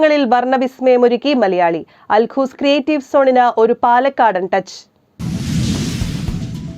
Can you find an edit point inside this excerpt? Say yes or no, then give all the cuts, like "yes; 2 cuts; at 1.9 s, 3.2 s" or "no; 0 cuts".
yes; 1 cut; at 5.2 s